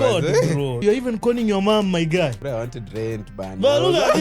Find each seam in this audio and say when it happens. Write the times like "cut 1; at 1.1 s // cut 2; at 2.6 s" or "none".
cut 1; at 0.8 s // cut 2; at 2.4 s